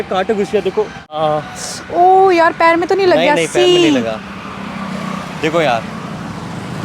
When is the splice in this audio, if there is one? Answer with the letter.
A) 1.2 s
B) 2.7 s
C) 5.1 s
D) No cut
A